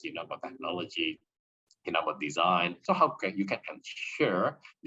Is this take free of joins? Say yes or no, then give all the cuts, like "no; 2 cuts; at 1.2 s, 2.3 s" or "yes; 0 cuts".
no; 1 cut; at 2.8 s